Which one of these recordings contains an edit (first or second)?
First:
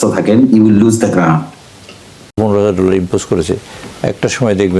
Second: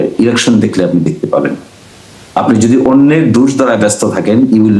first